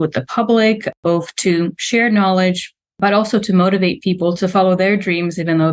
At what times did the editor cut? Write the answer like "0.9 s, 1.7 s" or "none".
none